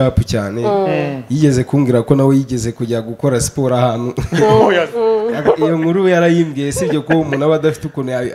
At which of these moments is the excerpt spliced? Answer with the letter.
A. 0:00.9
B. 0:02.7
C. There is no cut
C